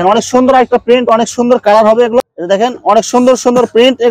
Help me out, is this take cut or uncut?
cut